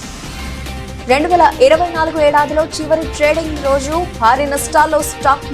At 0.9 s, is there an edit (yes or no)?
no